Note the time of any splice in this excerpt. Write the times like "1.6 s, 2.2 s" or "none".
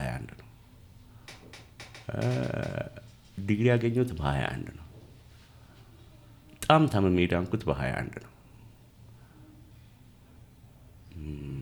none